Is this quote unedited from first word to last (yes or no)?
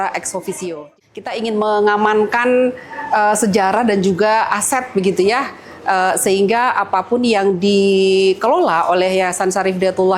no